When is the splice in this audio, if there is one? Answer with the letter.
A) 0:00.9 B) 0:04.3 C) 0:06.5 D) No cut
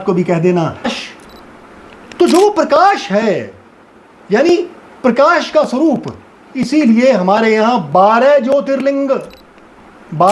A